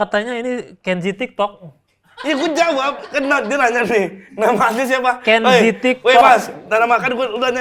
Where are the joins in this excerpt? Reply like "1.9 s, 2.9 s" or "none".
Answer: none